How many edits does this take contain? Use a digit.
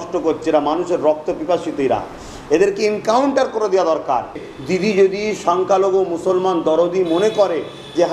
1